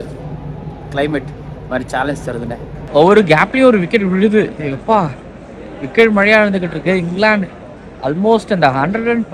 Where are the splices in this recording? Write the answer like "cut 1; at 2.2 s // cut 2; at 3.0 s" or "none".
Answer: cut 1; at 2.8 s

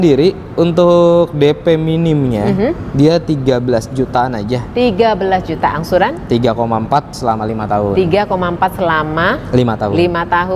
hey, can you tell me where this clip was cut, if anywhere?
none

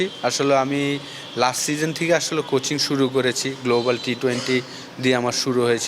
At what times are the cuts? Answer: none

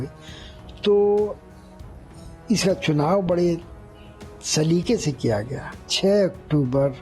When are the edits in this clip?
cut 1; at 5.9 s

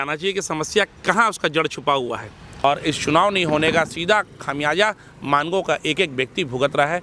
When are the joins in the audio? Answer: cut 1; at 2.6 s

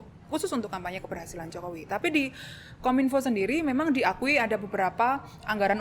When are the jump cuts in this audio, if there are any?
none

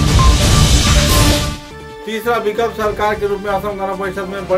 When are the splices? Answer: none

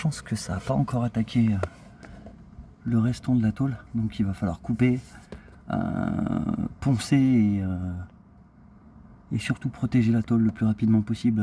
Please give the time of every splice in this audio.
none

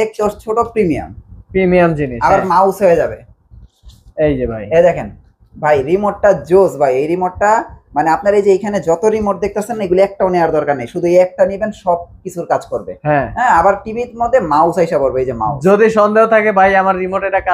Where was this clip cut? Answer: none

